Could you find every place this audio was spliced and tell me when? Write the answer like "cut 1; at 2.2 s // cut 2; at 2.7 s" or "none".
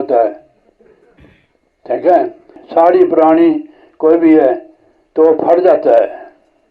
cut 1; at 2.6 s